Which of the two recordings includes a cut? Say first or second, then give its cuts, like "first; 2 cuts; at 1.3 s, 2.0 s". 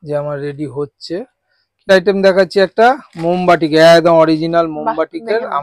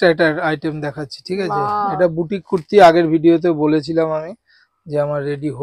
first; 1 cut; at 1.9 s